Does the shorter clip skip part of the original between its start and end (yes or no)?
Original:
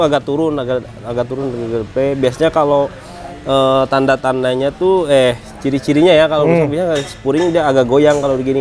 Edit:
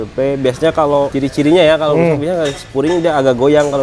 yes